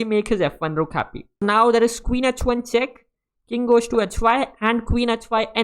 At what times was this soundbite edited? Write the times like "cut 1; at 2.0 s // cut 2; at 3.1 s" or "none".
cut 1; at 1.4 s

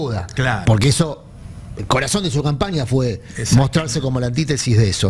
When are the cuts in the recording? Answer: none

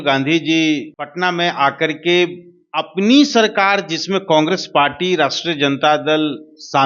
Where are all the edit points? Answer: cut 1; at 1.0 s

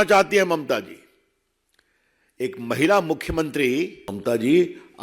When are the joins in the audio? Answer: cut 1; at 4.1 s

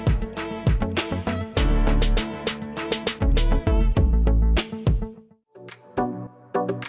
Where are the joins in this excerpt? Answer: cut 1; at 5.3 s

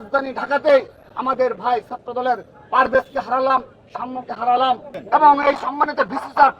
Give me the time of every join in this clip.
cut 1; at 4.9 s

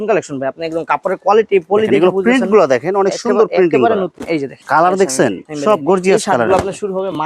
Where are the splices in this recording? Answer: none

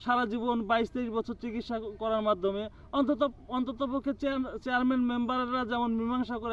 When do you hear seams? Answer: none

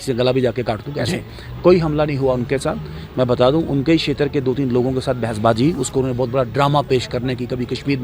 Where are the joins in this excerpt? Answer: cut 1; at 1.1 s

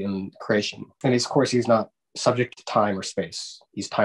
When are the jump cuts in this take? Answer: none

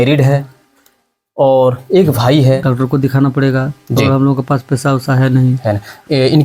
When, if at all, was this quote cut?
cut 1; at 2.6 s

